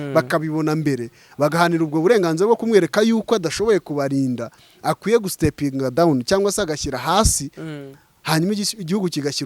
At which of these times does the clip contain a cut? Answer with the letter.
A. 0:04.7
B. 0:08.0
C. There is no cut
C